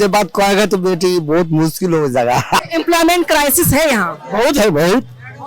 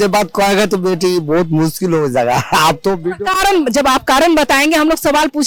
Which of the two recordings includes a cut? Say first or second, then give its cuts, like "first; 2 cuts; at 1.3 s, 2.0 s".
first; 1 cut; at 2.6 s